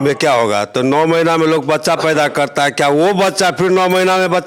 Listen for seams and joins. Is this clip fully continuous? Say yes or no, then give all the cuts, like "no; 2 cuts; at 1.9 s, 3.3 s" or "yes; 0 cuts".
yes; 0 cuts